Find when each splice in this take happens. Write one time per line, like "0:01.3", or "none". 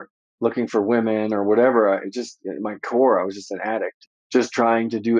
0:04.1

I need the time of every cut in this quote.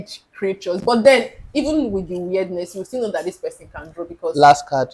none

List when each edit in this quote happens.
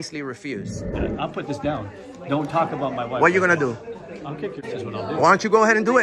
0:00.9
0:04.6

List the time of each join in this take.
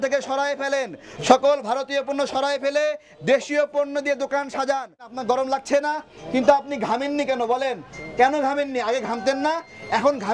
0:05.1

